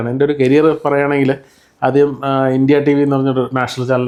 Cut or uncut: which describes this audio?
uncut